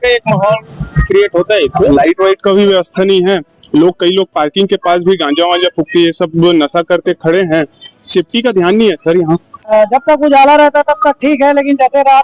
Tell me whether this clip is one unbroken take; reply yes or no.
no